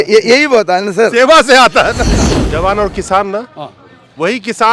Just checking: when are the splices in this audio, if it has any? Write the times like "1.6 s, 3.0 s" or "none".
2.3 s